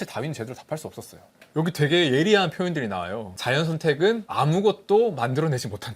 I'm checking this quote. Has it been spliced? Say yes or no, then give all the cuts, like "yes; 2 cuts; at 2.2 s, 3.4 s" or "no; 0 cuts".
yes; 2 cuts; at 1.2 s, 3.3 s